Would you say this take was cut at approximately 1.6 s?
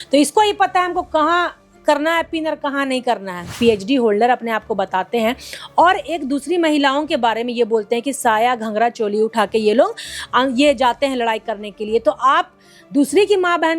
no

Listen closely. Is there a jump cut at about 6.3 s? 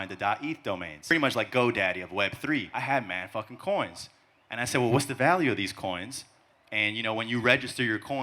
no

